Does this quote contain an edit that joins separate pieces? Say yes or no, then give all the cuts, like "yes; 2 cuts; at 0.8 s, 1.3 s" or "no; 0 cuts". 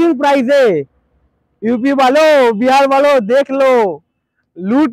no; 0 cuts